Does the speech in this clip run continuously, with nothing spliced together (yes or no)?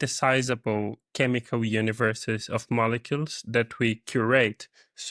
yes